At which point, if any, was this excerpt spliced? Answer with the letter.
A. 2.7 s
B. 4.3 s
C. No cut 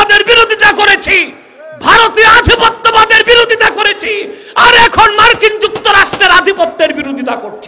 C